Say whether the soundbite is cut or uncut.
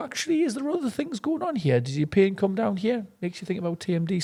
uncut